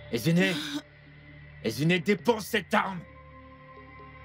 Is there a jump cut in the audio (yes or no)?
yes